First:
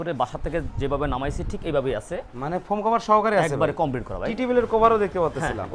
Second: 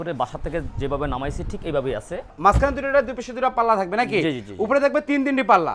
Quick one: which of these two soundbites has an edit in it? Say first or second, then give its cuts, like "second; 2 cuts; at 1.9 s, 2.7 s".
second; 1 cut; at 2.3 s